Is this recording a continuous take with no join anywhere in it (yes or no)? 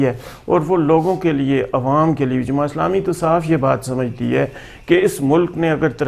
yes